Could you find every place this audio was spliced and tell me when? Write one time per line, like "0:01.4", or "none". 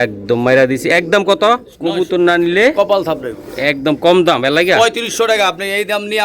0:01.8